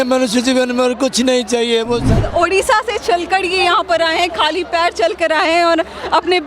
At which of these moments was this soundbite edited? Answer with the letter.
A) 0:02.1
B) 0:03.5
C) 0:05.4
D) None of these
A